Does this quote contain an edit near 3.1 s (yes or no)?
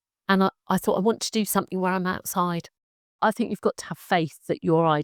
yes